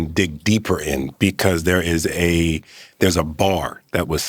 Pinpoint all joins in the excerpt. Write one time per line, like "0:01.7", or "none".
none